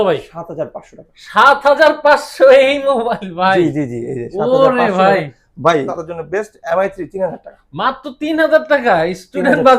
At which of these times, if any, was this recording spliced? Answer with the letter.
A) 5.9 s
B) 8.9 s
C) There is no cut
A